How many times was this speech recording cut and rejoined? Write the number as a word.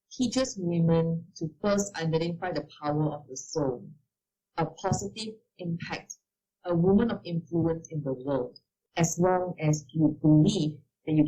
two